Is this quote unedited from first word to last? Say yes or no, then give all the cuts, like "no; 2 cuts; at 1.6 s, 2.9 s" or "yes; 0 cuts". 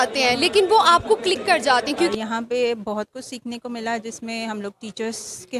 no; 1 cut; at 2.1 s